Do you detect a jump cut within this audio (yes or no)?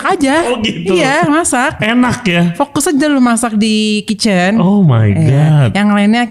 no